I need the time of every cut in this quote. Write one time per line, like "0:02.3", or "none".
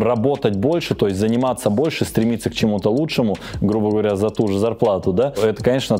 none